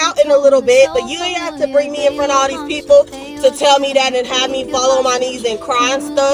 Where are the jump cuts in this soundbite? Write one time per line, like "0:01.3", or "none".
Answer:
none